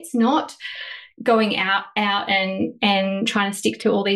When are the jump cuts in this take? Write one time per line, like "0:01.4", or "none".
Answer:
none